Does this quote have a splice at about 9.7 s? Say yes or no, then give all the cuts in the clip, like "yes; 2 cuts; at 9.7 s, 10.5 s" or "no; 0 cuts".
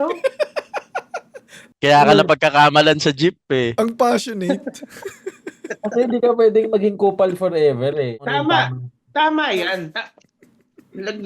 no; 1 cut; at 8.1 s